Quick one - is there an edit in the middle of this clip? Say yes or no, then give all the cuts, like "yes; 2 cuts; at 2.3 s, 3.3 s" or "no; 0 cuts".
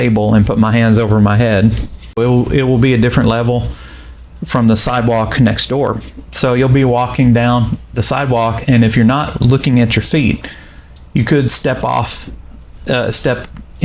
yes; 1 cut; at 2.2 s